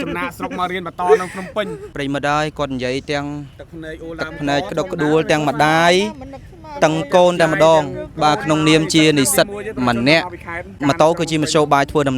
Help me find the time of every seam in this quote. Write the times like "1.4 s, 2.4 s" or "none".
1.8 s, 10.8 s